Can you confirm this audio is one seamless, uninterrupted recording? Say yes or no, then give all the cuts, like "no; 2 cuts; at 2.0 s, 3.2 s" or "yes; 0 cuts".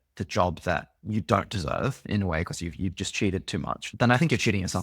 no; 2 cuts; at 0.9 s, 3.9 s